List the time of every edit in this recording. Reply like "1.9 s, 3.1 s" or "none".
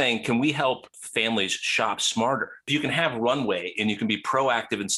0.9 s, 2.6 s